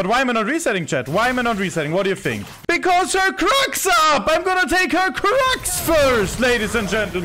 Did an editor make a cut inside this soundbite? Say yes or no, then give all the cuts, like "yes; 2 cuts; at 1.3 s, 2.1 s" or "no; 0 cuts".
yes; 1 cut; at 2.5 s